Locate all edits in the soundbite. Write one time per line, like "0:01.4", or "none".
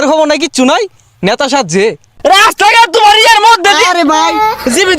0:02.0